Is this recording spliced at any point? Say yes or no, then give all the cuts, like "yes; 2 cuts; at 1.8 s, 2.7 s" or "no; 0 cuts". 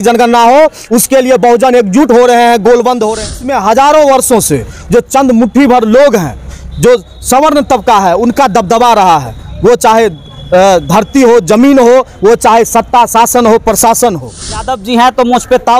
yes; 2 cuts; at 3.3 s, 14.6 s